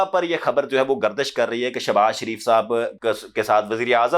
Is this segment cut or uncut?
uncut